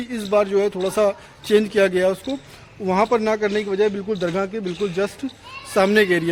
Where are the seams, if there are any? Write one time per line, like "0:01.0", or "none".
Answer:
none